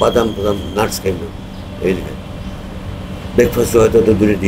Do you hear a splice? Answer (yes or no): no